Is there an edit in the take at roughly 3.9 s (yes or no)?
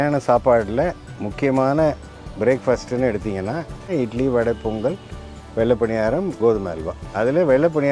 yes